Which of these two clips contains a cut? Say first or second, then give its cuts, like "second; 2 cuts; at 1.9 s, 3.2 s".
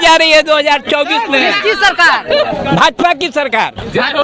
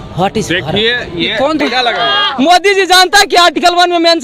second; 1 cut; at 1.6 s